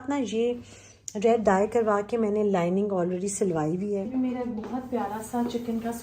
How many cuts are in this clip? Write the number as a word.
one